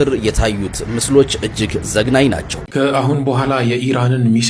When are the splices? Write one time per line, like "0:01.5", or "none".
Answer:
0:02.6